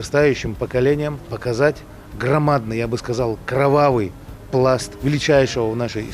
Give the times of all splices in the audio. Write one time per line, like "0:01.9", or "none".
0:01.4
0:04.9